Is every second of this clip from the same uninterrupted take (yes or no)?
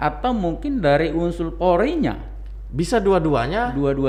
yes